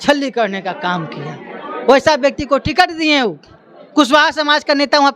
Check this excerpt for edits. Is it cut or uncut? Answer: uncut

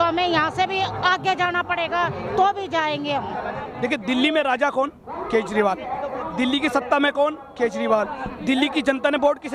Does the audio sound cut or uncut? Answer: cut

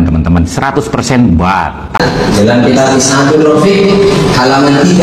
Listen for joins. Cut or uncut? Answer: cut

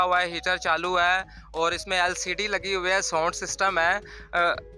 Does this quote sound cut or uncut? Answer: uncut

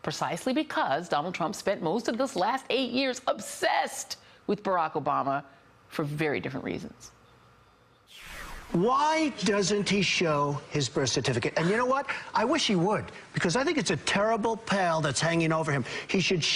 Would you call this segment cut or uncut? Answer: uncut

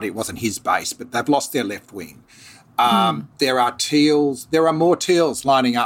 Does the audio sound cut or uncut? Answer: uncut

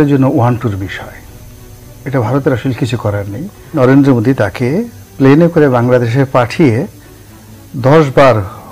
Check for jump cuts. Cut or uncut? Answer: cut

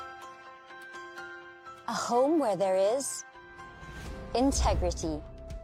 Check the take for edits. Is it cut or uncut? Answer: uncut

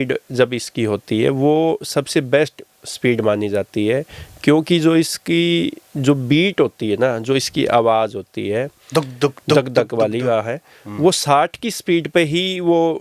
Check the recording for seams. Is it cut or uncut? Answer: uncut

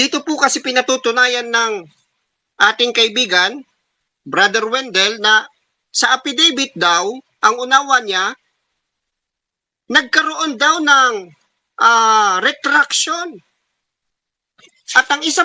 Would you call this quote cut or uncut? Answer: uncut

